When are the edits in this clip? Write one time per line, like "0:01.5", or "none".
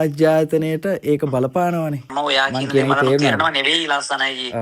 0:02.1